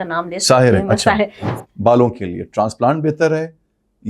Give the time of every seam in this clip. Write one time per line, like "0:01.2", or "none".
0:01.4